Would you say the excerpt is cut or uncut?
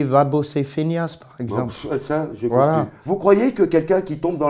cut